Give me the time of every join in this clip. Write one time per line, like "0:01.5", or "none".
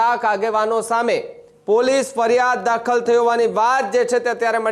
none